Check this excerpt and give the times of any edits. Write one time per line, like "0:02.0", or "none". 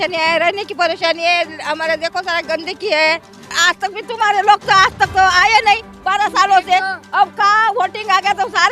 0:03.5